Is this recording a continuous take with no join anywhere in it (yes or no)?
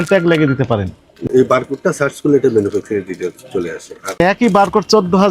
no